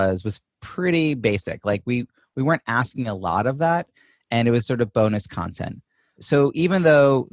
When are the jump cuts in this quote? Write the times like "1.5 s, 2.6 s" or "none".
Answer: 6.2 s